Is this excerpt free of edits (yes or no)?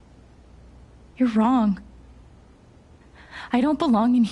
no